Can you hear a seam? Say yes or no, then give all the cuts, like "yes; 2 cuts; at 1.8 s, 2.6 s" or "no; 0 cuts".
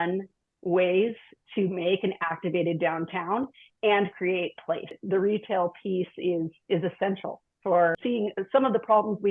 yes; 2 cuts; at 5.0 s, 7.9 s